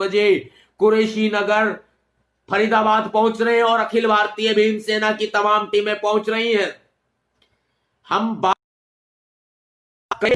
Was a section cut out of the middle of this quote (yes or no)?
no